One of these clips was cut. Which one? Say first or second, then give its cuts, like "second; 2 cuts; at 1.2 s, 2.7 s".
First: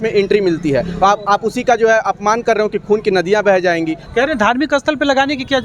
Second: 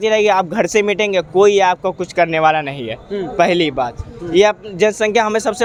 first; 1 cut; at 4.0 s